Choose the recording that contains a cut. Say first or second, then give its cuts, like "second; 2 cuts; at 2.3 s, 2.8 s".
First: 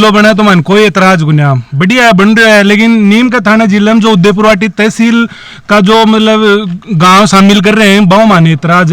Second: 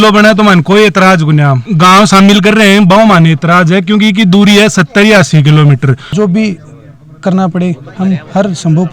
second; 2 cuts; at 1.6 s, 6.1 s